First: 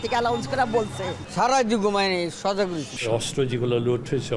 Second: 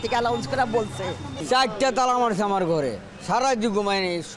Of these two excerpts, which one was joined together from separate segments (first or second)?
first